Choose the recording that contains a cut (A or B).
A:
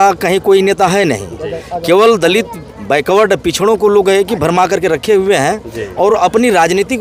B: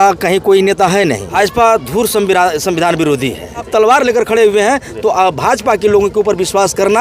B